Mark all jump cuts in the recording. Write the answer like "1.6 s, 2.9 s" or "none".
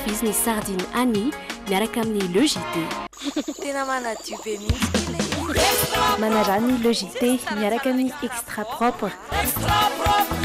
none